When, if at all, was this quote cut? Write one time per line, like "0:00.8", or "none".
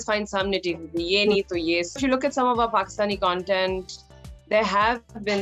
0:02.0